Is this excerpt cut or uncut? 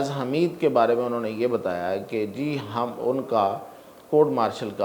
uncut